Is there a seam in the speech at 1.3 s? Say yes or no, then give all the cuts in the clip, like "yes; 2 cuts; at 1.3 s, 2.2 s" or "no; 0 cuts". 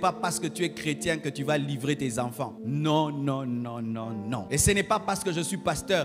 no; 2 cuts; at 2.6 s, 4.4 s